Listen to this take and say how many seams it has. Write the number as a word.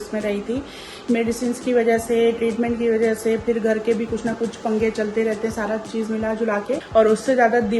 one